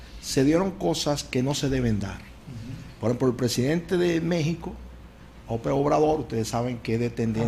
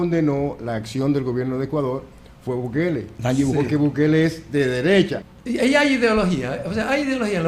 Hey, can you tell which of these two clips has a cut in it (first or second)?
second